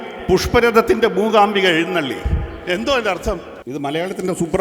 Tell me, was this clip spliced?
yes; 1 cut; at 3.5 s

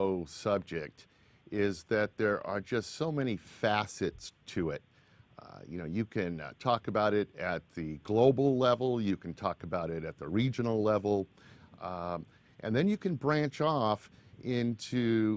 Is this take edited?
no; 0 cuts

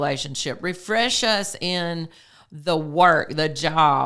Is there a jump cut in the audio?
no; 0 cuts

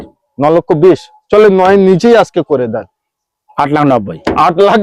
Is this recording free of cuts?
yes; 0 cuts

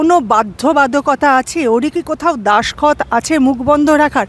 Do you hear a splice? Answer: no; 0 cuts

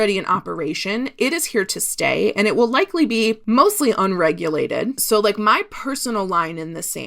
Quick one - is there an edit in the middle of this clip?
yes; 2 cuts; at 3.4 s, 5.0 s

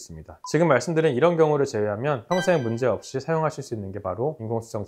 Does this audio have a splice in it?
no; 0 cuts

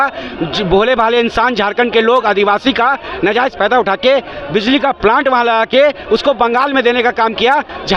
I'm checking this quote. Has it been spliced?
no; 0 cuts

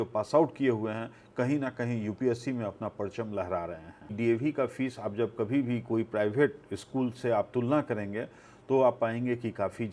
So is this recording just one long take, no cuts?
no; 1 cut; at 4.1 s

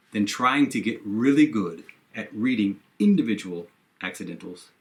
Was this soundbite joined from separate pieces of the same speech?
no; 0 cuts

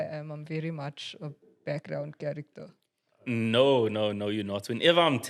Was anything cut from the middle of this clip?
no; 0 cuts

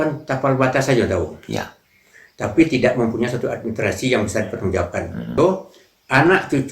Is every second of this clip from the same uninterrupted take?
no; 1 cut; at 5.4 s

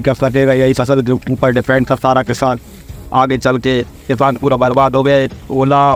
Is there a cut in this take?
no; 0 cuts

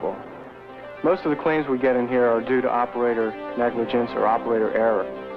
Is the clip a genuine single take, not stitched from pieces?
yes; 0 cuts

